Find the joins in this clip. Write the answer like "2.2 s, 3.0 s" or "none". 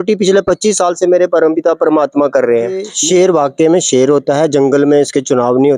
2.9 s